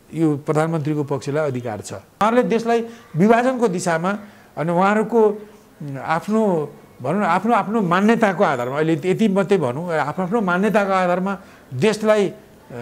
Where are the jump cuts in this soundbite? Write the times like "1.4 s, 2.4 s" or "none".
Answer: 2.2 s